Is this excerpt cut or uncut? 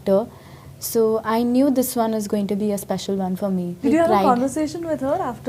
cut